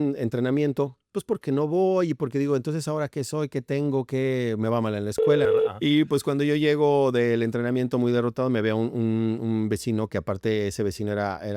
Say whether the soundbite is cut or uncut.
cut